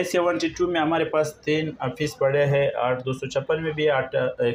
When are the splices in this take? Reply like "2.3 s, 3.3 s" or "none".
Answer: none

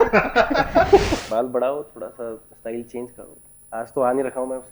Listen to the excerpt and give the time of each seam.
1.2 s

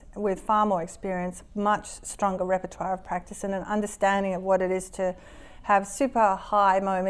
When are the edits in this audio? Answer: none

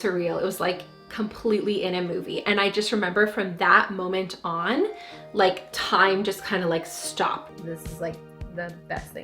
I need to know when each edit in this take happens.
7.5 s

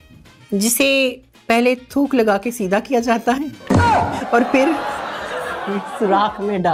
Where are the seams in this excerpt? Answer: none

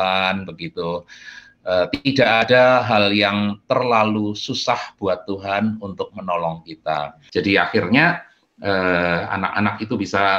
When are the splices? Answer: 7.2 s

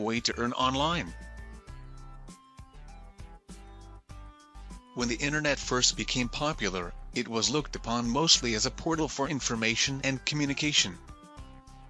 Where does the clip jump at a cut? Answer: 1.2 s, 4.5 s, 11.0 s

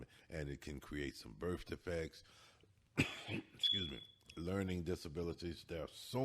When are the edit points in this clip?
none

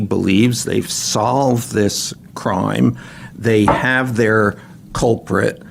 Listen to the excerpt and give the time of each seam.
none

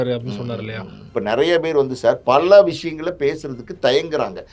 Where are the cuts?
1.1 s

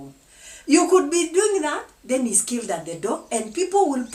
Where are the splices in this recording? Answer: none

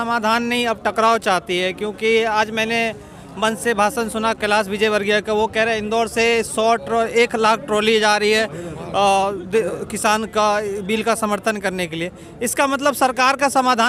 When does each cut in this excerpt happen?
none

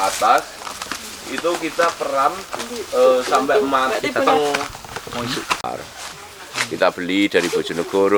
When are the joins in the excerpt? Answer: 5.7 s

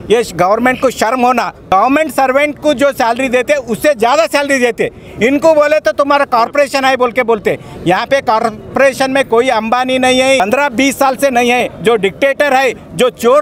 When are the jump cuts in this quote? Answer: 1.7 s, 10.4 s

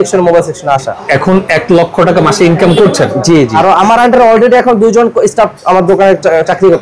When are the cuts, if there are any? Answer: 0.9 s, 3.6 s

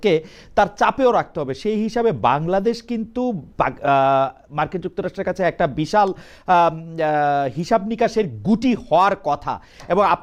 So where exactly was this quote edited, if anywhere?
none

